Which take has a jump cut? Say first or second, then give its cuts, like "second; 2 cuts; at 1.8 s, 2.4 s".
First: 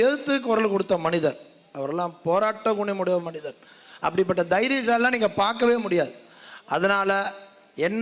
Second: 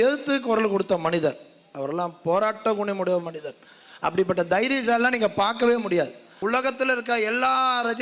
second; 1 cut; at 6.3 s